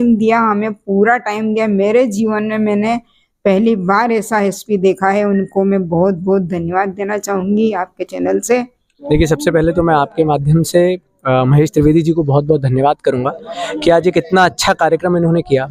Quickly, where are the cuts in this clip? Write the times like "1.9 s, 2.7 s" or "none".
9.0 s